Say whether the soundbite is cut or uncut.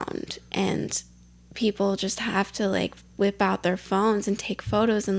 uncut